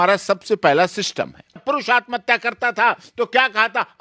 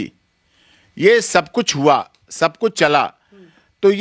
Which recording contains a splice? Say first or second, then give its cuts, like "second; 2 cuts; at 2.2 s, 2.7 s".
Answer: first; 1 cut; at 1.6 s